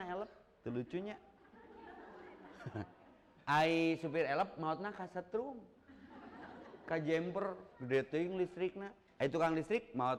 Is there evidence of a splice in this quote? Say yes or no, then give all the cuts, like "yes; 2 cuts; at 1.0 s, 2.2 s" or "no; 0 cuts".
no; 0 cuts